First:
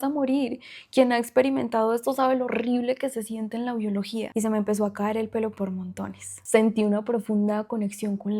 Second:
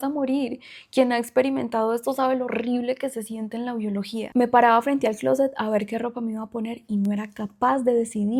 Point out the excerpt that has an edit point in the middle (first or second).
first